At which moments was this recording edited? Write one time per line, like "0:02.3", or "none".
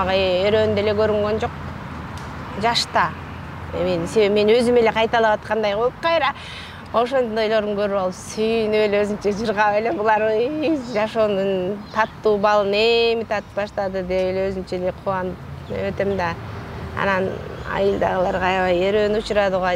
none